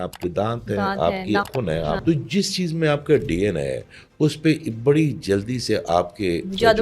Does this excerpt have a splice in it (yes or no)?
yes